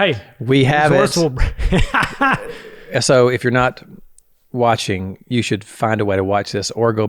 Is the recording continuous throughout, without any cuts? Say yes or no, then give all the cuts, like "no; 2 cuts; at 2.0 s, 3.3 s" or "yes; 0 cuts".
yes; 0 cuts